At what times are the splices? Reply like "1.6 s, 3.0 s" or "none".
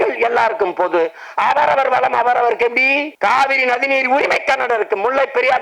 3.1 s